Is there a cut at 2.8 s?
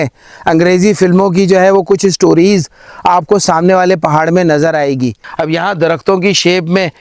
no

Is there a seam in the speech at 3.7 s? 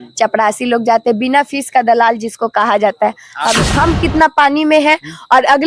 yes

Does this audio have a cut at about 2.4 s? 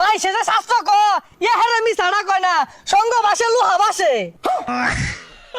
no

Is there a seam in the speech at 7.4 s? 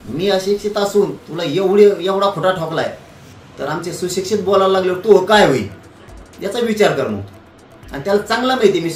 no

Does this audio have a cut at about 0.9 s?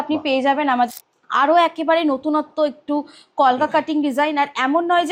yes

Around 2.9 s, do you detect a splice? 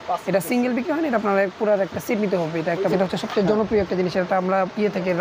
yes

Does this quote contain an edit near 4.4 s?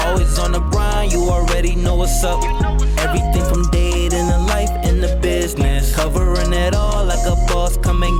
no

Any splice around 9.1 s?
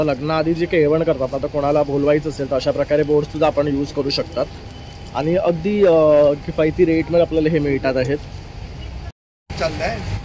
no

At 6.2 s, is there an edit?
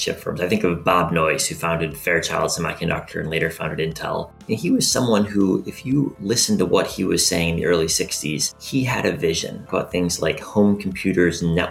yes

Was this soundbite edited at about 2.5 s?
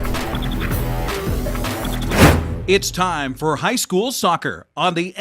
yes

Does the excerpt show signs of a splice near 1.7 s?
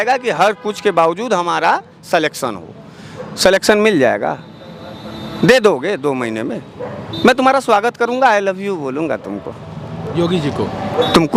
no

